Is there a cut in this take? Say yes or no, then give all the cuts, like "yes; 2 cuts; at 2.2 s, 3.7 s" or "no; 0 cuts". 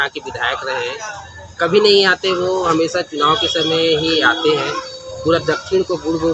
no; 0 cuts